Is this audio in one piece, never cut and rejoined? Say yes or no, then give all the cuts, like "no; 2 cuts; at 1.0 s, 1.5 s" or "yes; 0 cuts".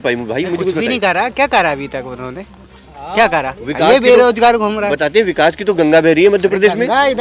yes; 0 cuts